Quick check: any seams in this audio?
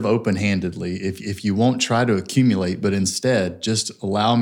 no; 0 cuts

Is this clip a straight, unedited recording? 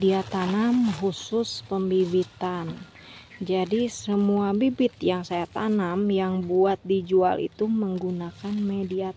yes; 0 cuts

